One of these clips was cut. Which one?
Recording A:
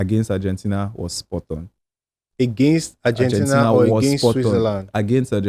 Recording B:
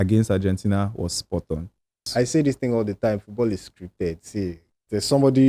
B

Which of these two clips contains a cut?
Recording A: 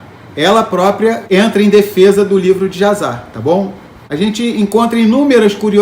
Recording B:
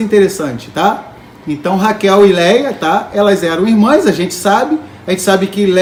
A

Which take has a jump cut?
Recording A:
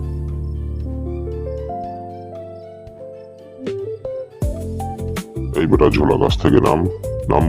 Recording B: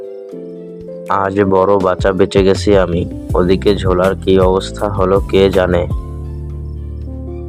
A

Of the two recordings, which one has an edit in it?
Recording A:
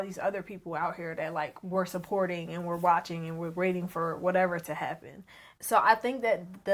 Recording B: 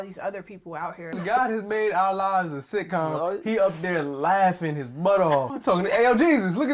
B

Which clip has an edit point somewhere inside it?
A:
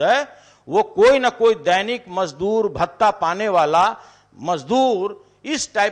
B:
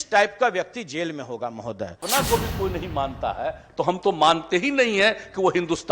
B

